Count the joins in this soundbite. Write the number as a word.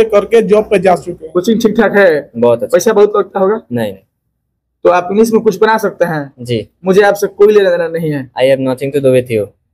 one